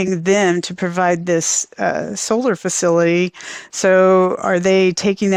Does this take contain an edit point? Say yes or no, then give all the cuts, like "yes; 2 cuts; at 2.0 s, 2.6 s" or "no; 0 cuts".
no; 0 cuts